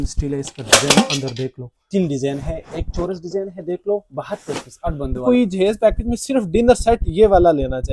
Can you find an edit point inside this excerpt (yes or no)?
yes